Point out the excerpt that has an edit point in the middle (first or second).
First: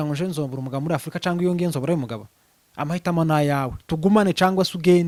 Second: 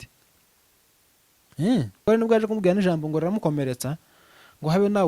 second